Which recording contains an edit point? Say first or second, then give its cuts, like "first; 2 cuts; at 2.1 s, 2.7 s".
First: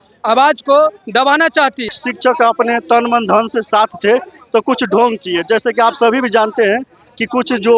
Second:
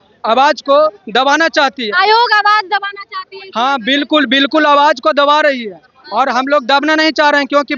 first; 1 cut; at 1.8 s